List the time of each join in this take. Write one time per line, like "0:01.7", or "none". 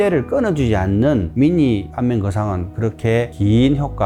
none